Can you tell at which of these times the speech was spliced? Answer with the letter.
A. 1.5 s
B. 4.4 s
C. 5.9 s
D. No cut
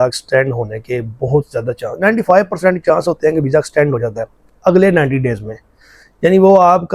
D